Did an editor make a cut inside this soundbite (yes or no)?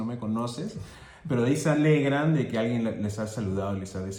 no